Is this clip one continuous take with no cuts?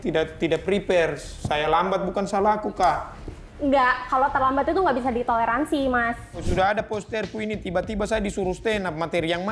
no; 1 cut; at 6.4 s

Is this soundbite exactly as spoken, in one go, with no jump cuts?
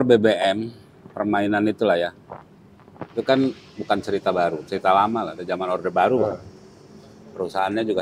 yes; 0 cuts

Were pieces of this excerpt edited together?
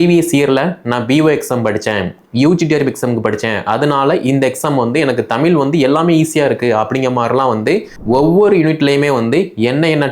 yes; 1 cut; at 7.9 s

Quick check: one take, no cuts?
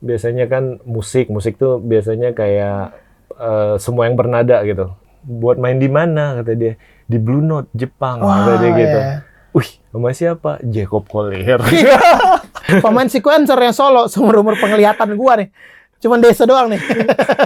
no; 2 cuts; at 4.9 s, 12.6 s

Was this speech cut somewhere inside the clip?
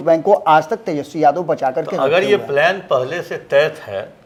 no; 0 cuts

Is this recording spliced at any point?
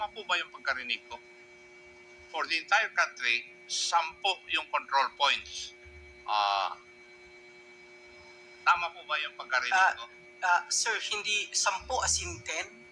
no; 0 cuts

